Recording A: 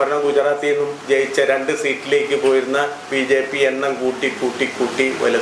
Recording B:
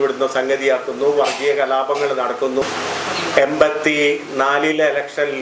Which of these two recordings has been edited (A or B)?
B